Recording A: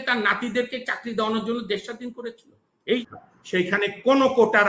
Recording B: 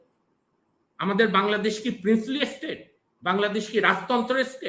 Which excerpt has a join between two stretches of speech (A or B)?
A